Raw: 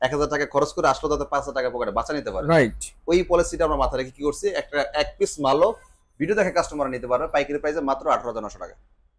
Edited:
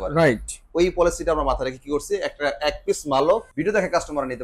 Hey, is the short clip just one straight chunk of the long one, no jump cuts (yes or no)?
no